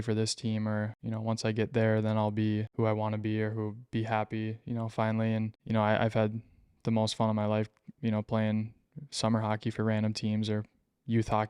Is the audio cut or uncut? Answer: cut